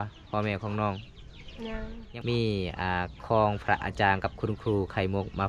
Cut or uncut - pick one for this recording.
cut